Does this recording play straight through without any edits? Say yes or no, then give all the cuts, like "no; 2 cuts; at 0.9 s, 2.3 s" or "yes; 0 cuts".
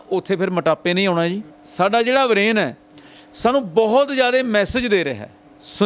no; 1 cut; at 1.6 s